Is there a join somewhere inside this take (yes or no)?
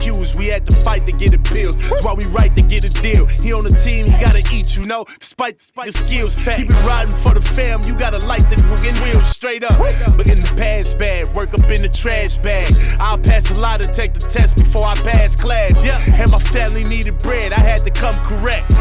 no